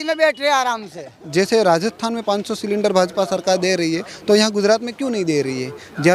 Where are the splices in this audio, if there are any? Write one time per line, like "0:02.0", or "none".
0:01.1